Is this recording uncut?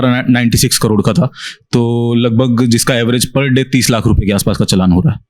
yes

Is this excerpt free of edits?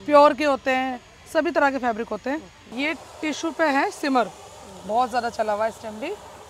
no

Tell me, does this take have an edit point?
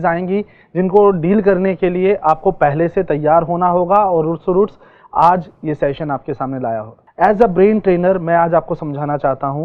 yes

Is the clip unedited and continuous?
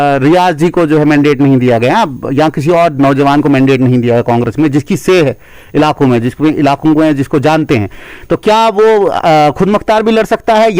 yes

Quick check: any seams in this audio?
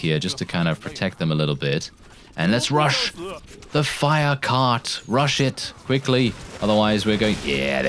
no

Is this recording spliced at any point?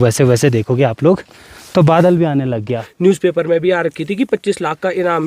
yes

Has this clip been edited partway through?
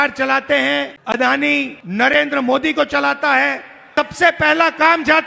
yes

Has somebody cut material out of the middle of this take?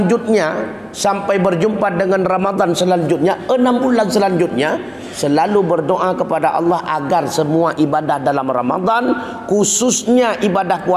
no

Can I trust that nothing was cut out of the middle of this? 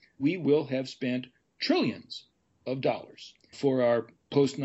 no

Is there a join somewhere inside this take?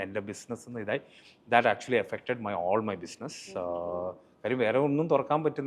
no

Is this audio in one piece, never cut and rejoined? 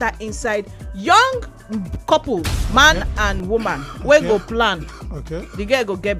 no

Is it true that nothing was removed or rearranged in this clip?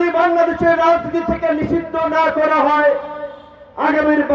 yes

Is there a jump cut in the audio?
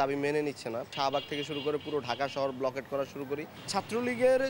yes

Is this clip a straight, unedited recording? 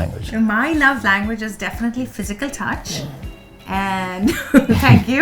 yes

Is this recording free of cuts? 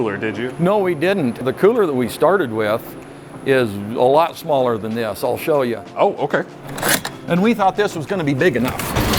no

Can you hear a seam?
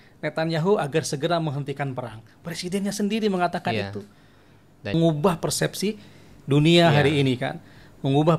yes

